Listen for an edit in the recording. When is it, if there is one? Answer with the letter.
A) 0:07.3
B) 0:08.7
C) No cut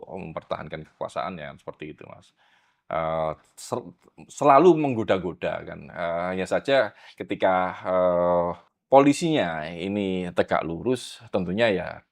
B